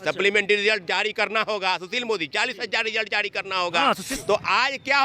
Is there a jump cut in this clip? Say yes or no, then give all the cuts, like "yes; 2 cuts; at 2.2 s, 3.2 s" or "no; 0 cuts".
yes; 1 cut; at 4.1 s